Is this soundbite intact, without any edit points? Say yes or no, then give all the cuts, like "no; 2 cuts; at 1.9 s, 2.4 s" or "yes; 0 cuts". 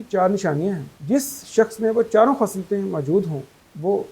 no; 1 cut; at 0.9 s